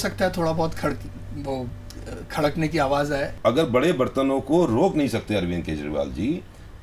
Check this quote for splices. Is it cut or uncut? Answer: cut